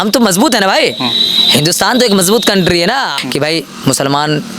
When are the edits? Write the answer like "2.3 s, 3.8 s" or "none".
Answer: 3.2 s